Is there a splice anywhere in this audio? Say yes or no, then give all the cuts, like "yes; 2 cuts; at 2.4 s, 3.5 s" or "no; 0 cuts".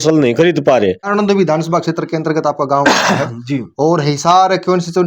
yes; 1 cut; at 1.0 s